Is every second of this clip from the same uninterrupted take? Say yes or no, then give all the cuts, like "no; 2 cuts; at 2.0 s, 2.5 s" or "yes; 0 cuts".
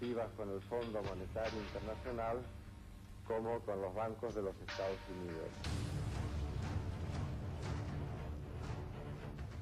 yes; 0 cuts